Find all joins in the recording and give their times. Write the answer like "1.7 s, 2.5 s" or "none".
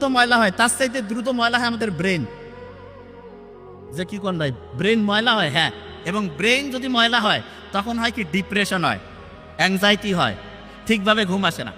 none